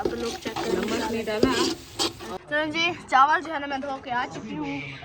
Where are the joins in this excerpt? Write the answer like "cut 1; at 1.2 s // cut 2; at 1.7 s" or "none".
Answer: cut 1; at 2.4 s